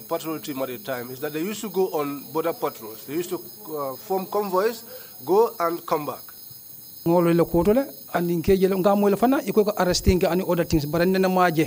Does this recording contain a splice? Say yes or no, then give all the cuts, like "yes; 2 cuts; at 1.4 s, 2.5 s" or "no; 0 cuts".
no; 0 cuts